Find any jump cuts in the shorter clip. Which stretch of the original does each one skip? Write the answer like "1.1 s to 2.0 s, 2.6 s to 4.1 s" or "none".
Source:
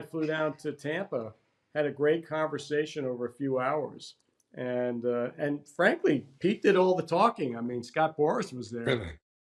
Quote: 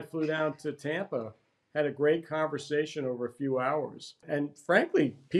4.2 s to 5.3 s